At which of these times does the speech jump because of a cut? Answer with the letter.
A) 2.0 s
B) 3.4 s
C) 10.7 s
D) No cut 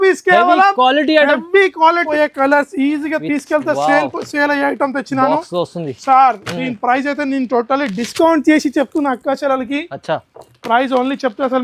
A